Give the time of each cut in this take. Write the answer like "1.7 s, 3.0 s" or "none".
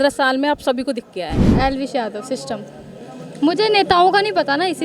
1.4 s